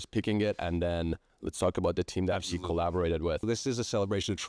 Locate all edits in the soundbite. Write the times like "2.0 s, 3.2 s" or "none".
1.3 s, 3.4 s